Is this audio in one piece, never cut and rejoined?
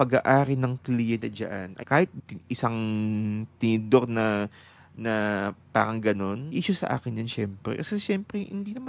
no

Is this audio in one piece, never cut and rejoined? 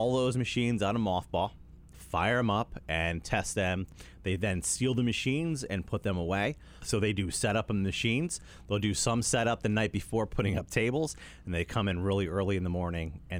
no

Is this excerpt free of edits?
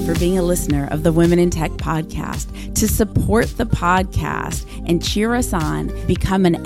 yes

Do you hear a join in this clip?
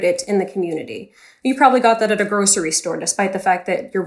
no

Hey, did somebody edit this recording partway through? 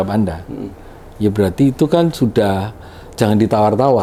no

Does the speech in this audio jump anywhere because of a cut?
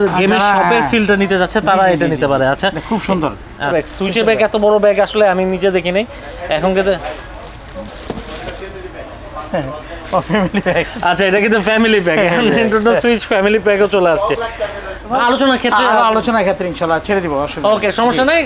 yes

